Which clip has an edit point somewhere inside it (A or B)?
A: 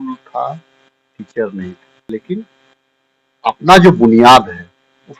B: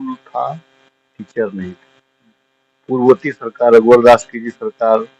A